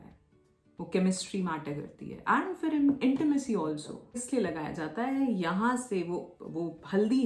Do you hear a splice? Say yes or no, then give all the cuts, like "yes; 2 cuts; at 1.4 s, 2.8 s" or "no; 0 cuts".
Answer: yes; 1 cut; at 4.2 s